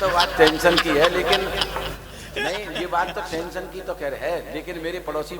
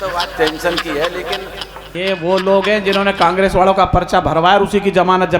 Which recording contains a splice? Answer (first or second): second